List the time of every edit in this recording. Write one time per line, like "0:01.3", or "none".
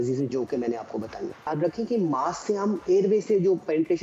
0:01.5